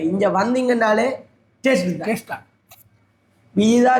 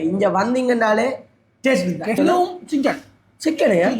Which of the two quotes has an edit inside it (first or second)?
second